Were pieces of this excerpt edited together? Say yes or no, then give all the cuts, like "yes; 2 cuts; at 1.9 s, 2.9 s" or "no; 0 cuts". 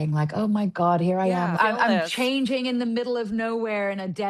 no; 0 cuts